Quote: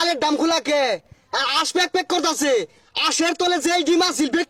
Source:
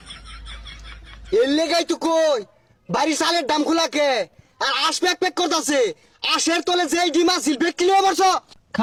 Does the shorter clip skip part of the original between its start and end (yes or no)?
no